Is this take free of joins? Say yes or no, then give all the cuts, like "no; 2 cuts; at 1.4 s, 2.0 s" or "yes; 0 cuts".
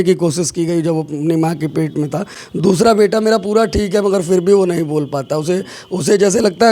yes; 0 cuts